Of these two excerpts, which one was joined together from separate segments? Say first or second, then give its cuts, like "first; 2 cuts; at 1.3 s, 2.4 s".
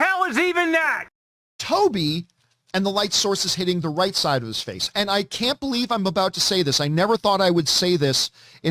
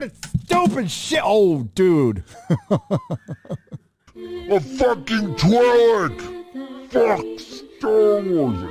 first; 1 cut; at 1.6 s